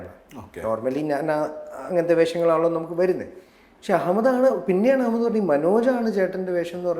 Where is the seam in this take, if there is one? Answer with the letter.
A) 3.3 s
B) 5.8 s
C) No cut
C